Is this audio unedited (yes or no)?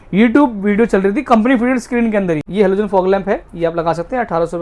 no